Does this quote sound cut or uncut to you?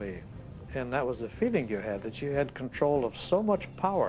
uncut